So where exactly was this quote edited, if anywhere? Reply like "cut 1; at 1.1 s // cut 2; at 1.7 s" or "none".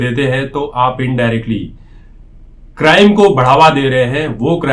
none